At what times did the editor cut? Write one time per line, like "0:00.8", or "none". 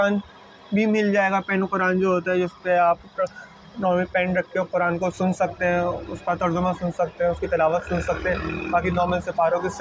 none